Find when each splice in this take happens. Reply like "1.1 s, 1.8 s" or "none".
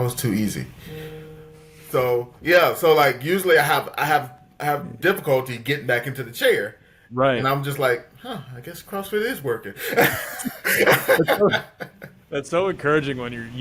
none